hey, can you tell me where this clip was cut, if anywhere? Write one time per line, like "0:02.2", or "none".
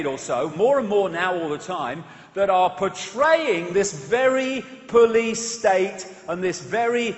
0:01.2